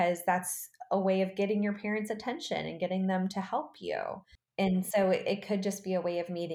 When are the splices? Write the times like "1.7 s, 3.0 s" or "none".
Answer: 4.4 s